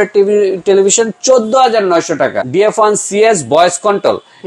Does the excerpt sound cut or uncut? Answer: cut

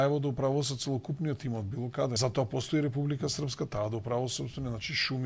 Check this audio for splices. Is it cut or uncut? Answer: cut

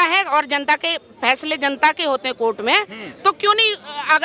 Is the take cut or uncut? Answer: uncut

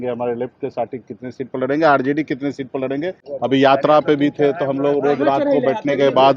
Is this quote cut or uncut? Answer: cut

